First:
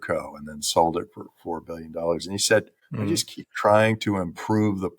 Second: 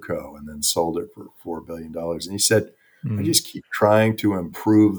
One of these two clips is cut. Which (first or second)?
first